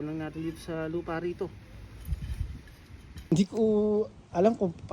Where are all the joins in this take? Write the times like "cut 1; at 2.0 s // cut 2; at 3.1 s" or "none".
cut 1; at 3.3 s